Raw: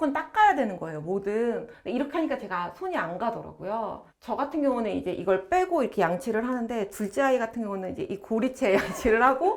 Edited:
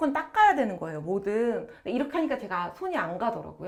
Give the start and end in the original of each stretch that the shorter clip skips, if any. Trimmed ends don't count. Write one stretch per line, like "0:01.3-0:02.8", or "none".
none